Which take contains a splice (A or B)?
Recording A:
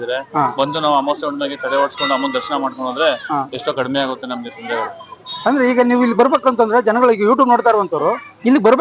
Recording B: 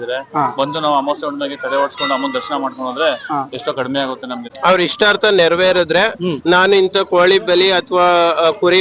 B